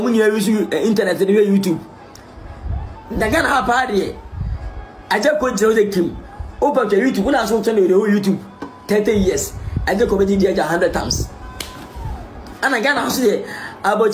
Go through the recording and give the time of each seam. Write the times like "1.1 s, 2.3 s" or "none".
none